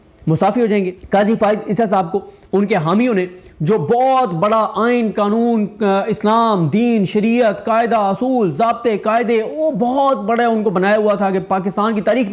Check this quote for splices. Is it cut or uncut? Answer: cut